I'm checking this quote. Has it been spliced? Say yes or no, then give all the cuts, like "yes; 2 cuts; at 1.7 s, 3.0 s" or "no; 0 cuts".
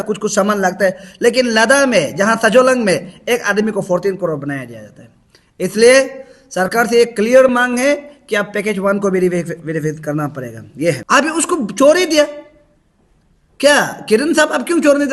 yes; 1 cut; at 11.0 s